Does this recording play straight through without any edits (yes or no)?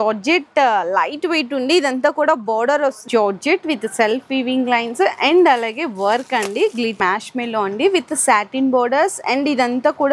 no